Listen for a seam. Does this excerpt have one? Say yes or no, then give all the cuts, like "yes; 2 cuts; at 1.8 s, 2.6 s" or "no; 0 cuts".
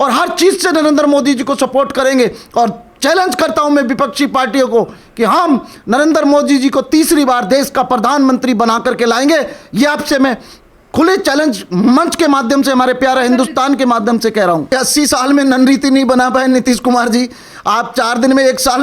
yes; 1 cut; at 14.7 s